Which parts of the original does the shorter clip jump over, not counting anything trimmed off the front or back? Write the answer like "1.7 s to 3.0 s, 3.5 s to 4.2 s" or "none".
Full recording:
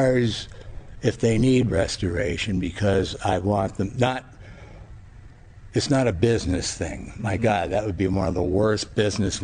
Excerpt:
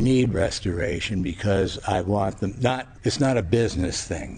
4.3 s to 5.6 s